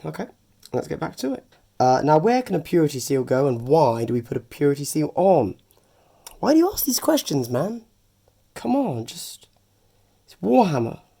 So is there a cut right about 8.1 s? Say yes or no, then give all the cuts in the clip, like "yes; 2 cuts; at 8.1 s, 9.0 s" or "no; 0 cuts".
no; 1 cut; at 1.6 s